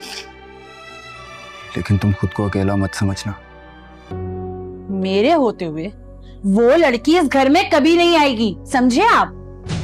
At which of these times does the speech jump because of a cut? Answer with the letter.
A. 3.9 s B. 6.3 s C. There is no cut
A